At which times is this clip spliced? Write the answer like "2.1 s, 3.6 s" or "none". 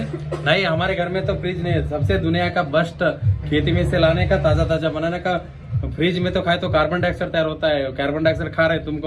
none